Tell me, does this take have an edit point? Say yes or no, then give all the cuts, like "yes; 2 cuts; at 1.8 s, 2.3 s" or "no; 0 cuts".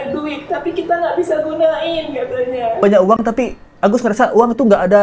yes; 1 cut; at 2.8 s